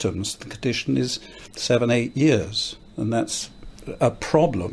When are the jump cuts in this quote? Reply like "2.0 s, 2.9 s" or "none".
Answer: none